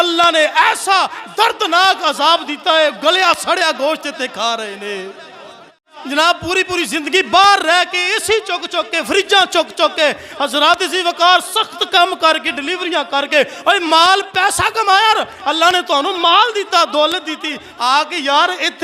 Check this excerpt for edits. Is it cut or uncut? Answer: cut